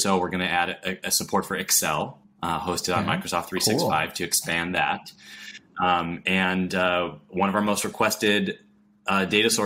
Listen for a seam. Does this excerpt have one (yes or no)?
no